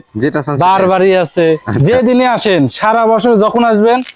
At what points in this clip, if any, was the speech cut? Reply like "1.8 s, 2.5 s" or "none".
1.7 s